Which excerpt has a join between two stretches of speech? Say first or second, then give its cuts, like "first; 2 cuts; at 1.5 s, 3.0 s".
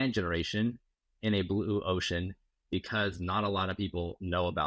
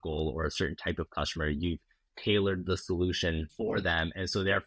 second; 1 cut; at 3.5 s